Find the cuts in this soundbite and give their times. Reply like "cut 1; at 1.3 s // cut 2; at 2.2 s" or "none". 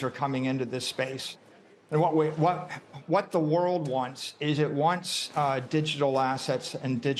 none